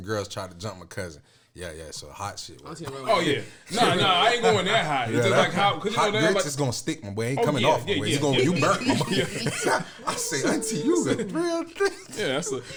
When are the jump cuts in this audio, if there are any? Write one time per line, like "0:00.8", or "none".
none